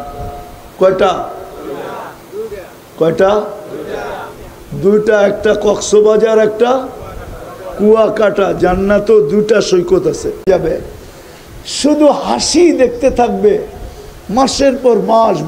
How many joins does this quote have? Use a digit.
1